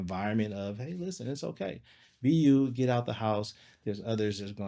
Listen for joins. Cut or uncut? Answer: uncut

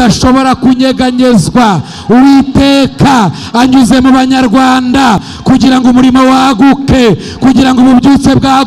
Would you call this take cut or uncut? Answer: uncut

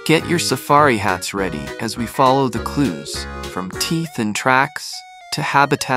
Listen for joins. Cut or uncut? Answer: uncut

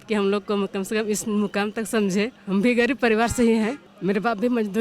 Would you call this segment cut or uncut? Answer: cut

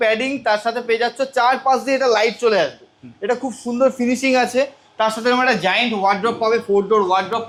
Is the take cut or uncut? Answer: uncut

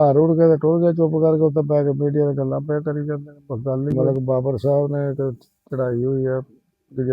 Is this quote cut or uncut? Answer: cut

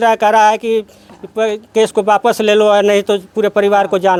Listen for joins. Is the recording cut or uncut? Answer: uncut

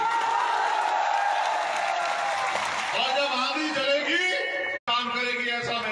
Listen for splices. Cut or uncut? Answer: cut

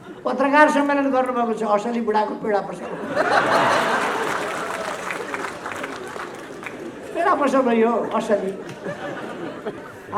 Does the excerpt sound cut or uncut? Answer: uncut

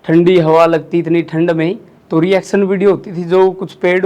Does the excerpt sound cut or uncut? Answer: cut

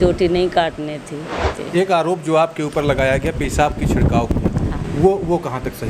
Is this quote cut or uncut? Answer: cut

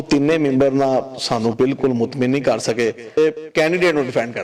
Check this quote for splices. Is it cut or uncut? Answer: cut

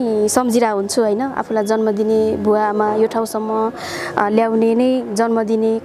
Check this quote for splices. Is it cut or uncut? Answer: uncut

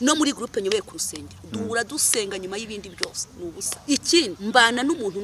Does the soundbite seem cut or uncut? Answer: cut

